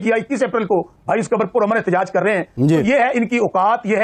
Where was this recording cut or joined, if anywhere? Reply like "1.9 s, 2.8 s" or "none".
none

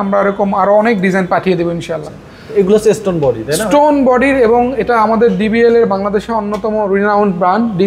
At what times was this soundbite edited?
none

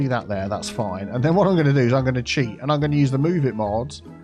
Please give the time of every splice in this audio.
none

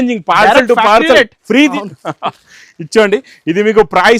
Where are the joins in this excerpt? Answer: 1.7 s

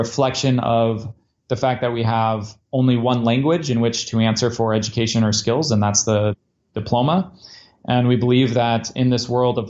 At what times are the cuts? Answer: none

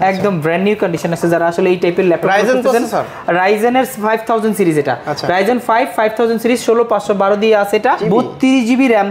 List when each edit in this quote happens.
8.0 s

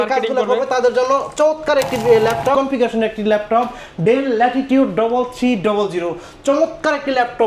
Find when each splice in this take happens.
2.5 s

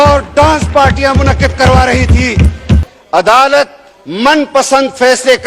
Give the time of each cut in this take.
2.9 s

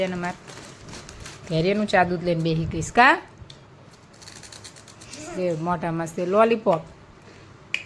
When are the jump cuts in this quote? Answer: none

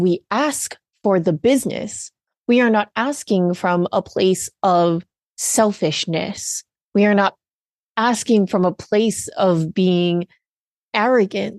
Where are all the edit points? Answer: none

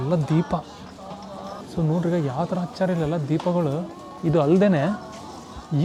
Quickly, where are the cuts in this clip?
none

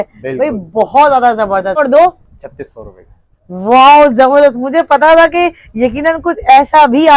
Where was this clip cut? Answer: 1.8 s

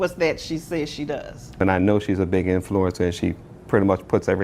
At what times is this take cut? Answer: 1.5 s

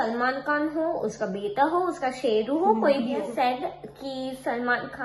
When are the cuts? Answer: 3.3 s

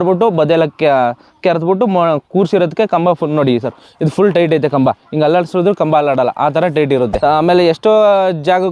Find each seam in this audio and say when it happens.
7.1 s

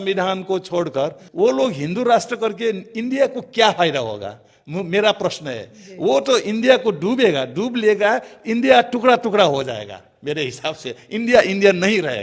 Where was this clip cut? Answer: none

